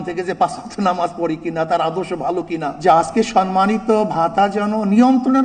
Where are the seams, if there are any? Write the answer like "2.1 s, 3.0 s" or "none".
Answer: 2.7 s